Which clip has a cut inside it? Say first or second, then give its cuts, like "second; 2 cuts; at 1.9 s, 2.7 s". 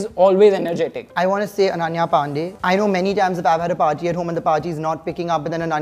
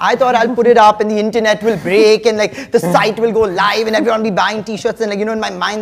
first; 2 cuts; at 1.0 s, 2.5 s